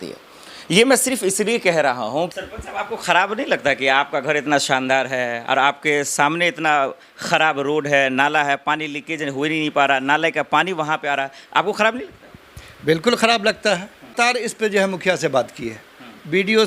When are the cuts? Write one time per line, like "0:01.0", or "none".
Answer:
0:02.3
0:14.1